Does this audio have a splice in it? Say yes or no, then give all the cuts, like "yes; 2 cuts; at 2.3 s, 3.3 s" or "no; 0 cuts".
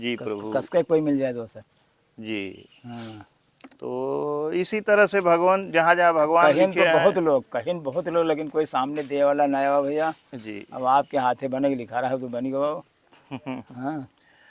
no; 0 cuts